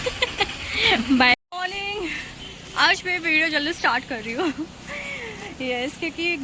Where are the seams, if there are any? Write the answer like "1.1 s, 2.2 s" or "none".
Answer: 1.3 s